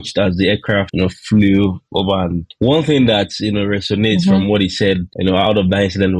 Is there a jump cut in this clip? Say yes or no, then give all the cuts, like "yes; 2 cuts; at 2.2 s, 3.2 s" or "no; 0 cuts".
no; 0 cuts